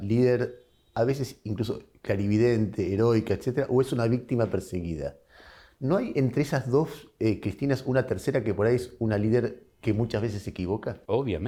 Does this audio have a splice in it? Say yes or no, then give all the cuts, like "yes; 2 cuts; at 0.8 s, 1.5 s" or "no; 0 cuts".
no; 0 cuts